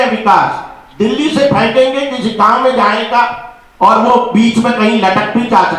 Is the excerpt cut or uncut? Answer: uncut